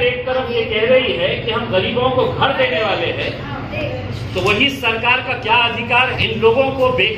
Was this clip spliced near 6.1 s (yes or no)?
yes